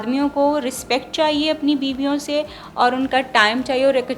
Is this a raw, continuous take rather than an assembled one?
yes; 0 cuts

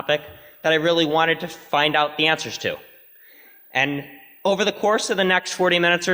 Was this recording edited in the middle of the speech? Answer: yes; 1 cut; at 3.0 s

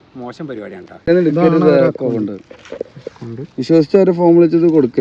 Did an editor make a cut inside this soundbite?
yes; 1 cut; at 1.1 s

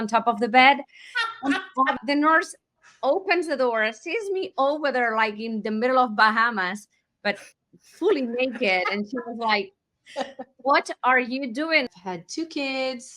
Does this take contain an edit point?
yes; 2 cuts; at 2.0 s, 11.9 s

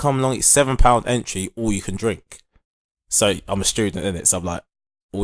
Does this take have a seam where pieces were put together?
no; 0 cuts

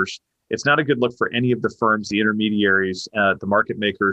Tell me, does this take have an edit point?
no; 0 cuts

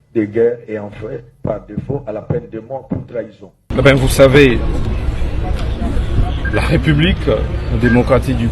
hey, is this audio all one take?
no; 1 cut; at 3.6 s

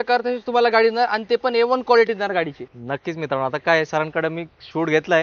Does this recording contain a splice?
no; 0 cuts

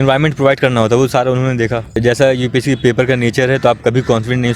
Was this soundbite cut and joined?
yes; 1 cut; at 2.0 s

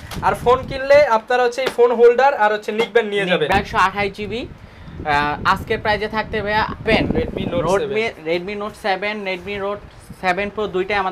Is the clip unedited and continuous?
no; 2 cuts; at 3.5 s, 6.9 s

